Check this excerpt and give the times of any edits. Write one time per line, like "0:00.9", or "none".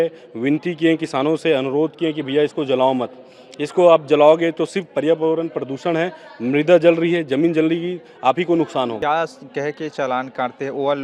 0:09.0